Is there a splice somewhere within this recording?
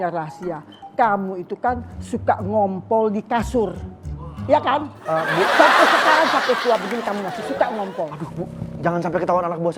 no; 0 cuts

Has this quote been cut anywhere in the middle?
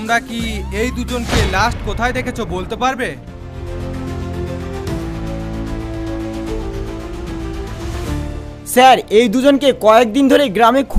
no; 0 cuts

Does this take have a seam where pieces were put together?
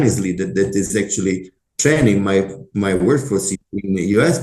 yes; 1 cut; at 3.5 s

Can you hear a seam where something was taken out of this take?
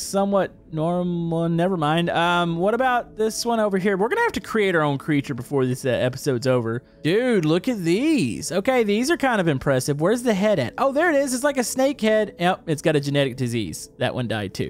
yes; 1 cut; at 6.9 s

